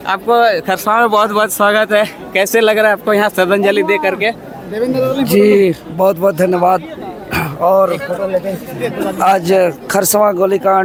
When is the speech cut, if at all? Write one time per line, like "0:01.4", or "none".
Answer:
none